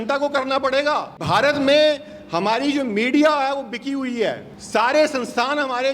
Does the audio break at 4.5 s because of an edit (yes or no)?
yes